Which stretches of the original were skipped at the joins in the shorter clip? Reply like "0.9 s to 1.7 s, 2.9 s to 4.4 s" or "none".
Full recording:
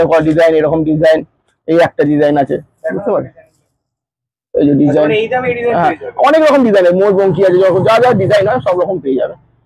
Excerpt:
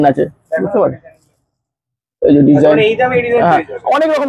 none